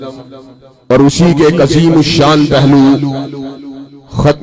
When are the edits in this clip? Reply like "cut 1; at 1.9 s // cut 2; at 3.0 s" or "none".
none